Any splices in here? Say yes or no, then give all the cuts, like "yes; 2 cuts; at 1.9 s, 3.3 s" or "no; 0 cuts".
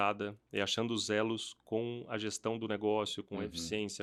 no; 0 cuts